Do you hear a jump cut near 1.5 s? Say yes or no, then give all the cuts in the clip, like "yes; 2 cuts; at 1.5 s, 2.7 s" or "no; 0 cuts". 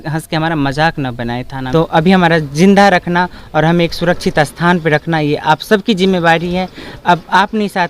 yes; 1 cut; at 1.5 s